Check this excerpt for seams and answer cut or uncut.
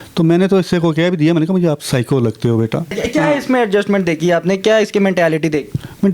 uncut